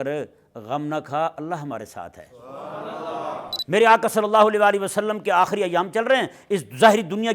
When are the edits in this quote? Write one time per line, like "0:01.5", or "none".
0:03.6

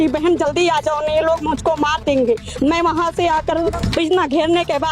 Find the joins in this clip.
0:03.8

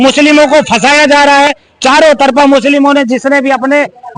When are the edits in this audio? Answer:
none

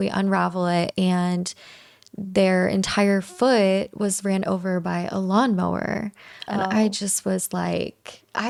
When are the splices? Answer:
none

